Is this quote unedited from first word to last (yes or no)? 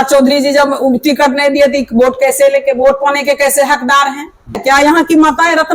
no